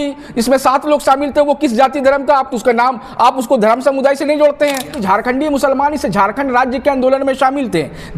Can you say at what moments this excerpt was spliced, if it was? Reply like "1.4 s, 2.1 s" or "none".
5.0 s